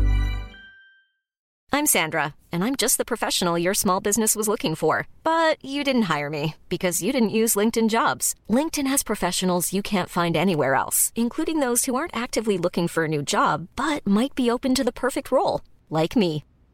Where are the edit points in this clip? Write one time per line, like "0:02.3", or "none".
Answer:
0:01.5